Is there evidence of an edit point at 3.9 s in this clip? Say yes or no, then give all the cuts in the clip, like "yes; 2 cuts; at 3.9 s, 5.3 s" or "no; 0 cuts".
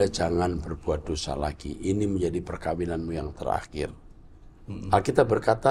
no; 0 cuts